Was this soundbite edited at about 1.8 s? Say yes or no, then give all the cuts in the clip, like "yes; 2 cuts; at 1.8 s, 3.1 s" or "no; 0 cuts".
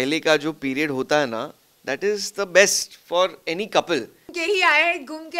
no; 1 cut; at 4.3 s